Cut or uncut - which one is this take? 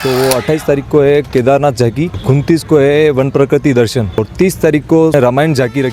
cut